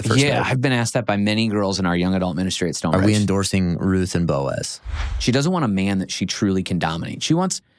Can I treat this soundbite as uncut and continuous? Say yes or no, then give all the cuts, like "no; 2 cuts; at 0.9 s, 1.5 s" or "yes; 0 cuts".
no; 1 cut; at 4.9 s